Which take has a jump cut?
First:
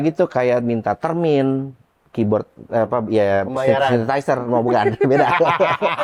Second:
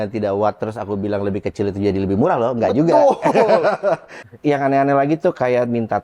second; 1 cut; at 4.1 s

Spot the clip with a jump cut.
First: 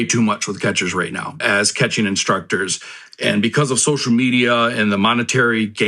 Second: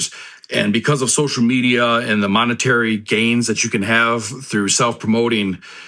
first; 1 cut; at 1.3 s

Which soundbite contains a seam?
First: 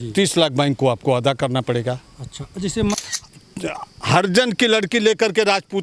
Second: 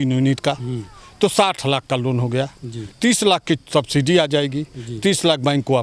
first; 1 cut; at 3.0 s

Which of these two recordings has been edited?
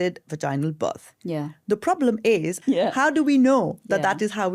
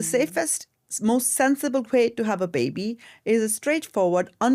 first; 1 cut; at 2.6 s

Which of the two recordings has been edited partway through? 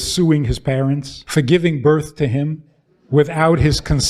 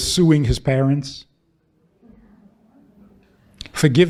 first; 1 cut; at 1.1 s

